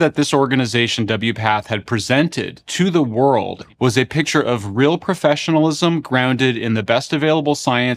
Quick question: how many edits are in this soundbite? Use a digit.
1